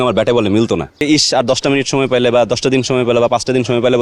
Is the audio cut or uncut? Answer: cut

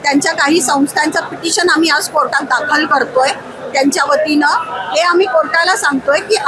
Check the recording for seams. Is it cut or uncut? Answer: uncut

